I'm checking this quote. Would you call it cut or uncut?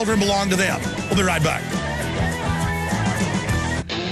uncut